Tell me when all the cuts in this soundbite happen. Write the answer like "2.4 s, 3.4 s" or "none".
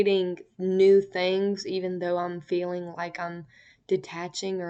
none